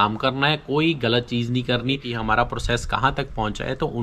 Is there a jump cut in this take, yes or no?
yes